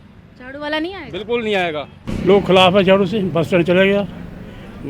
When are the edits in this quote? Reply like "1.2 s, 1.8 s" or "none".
2.0 s